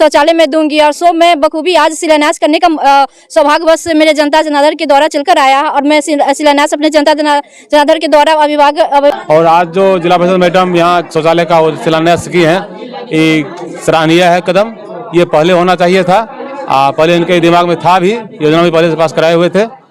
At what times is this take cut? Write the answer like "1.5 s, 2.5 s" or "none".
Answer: 9.1 s